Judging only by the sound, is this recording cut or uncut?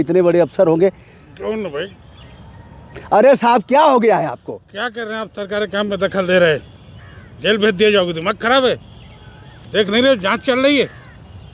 uncut